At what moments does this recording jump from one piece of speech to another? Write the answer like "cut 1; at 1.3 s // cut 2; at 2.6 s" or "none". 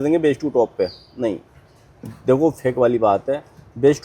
none